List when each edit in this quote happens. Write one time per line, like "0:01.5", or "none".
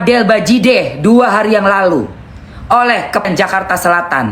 0:03.2